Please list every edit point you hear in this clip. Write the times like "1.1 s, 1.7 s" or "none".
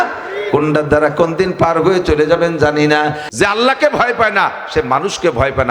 3.2 s

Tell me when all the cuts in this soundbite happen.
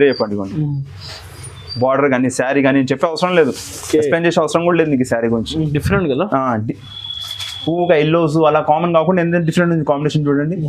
5.8 s

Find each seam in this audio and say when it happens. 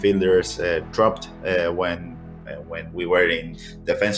none

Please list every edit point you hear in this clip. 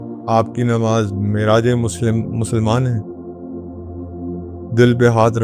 none

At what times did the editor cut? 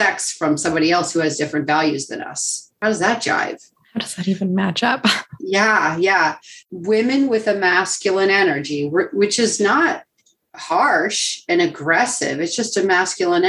none

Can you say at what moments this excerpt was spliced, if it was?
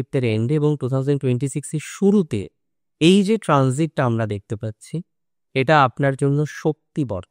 none

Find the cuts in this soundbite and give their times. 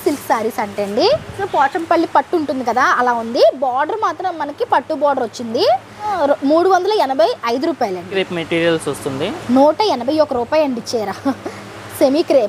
1.4 s, 6.1 s, 8.2 s

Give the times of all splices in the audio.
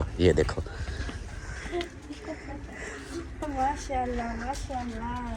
none

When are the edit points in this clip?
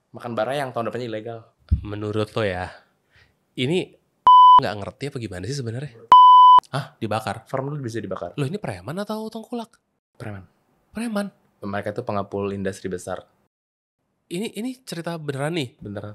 6.1 s, 6.7 s

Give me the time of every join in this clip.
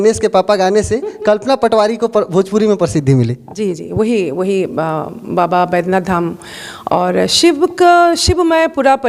none

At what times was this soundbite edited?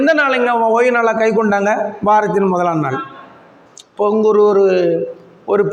none

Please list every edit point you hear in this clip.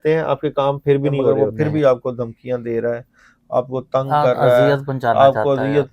1.5 s

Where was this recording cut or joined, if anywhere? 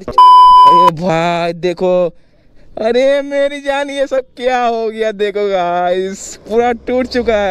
0.9 s

